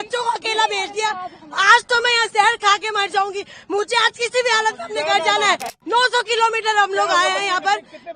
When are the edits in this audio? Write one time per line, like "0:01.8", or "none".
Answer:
0:05.8